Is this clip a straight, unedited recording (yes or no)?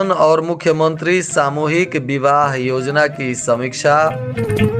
yes